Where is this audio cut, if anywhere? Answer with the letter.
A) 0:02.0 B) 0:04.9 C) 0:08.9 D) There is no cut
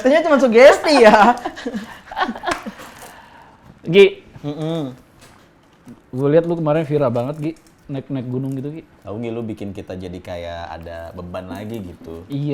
D